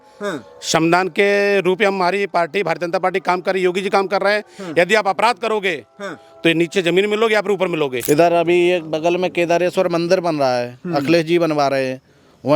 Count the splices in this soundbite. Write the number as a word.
one